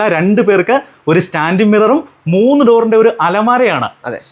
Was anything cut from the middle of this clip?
no; 0 cuts

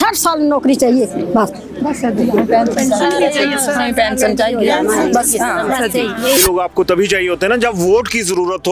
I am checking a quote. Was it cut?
yes; 1 cut; at 6.4 s

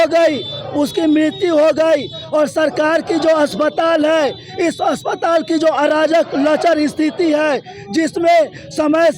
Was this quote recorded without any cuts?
yes; 0 cuts

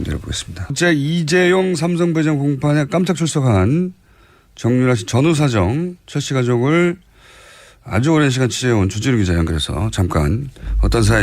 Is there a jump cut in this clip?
yes; 1 cut; at 1.8 s

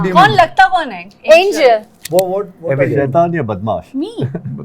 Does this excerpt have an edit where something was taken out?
yes; 1 cut; at 2.0 s

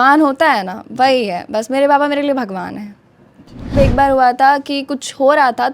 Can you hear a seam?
yes; 1 cut; at 3.7 s

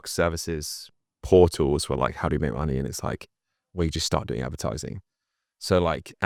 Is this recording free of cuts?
yes; 0 cuts

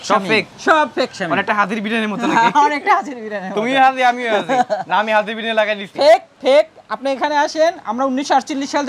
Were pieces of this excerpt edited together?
no; 0 cuts

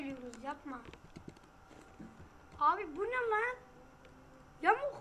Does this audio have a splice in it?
no; 0 cuts

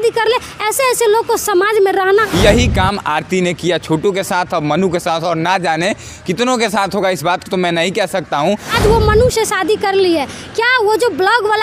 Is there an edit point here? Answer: yes; 2 cuts; at 2.2 s, 8.7 s

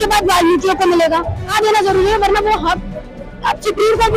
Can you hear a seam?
yes; 1 cut; at 1.5 s

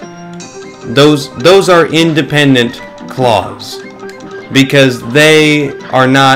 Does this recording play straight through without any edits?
yes; 0 cuts

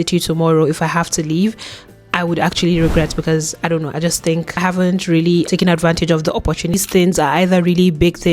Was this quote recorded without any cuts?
no; 1 cut; at 6.7 s

